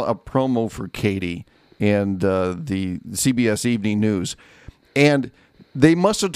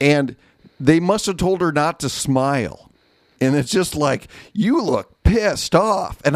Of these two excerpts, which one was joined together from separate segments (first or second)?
second